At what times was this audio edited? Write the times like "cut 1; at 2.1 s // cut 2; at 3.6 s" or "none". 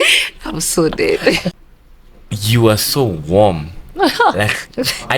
cut 1; at 1.5 s